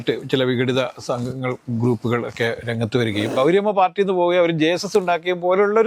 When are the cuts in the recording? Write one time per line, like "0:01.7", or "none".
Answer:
0:03.3